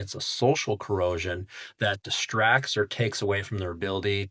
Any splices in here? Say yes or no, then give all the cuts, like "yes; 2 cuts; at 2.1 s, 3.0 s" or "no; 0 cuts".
no; 0 cuts